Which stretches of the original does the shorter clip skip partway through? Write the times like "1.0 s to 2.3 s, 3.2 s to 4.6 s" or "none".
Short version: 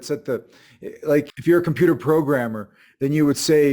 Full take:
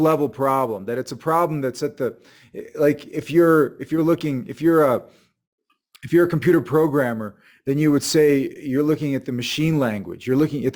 3.1 s to 6.0 s